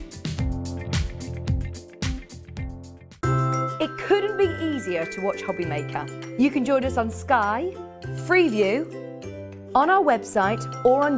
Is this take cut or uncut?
cut